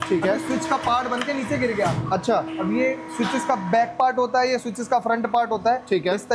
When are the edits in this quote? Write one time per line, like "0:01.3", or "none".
none